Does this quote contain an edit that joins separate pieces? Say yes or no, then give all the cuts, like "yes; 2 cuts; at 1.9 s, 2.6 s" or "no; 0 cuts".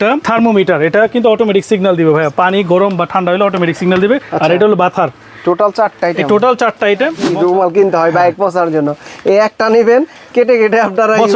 yes; 1 cut; at 7.3 s